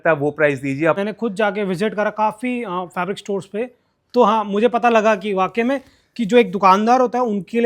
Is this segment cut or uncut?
cut